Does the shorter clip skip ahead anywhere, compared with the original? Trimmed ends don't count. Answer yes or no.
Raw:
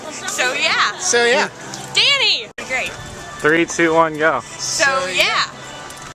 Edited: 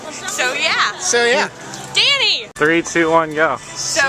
yes